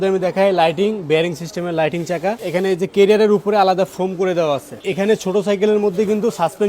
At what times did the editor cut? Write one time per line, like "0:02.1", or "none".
0:02.4
0:04.8